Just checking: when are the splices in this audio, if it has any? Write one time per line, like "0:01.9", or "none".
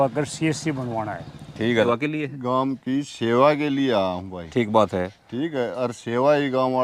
0:01.9